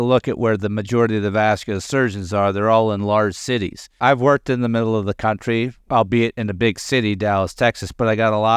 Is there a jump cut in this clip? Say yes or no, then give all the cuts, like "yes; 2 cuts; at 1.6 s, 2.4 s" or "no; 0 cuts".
yes; 2 cuts; at 4.0 s, 5.8 s